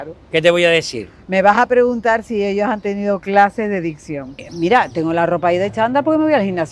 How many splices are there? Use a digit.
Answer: 1